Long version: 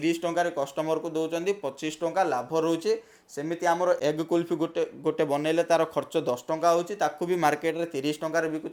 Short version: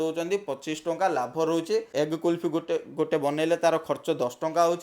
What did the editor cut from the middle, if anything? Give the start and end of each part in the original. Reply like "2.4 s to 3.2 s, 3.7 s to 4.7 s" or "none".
3.1 s to 4.0 s